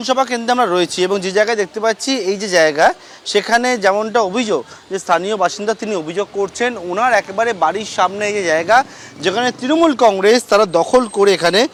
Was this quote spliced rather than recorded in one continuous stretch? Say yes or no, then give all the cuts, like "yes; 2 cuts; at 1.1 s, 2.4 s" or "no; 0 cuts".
no; 0 cuts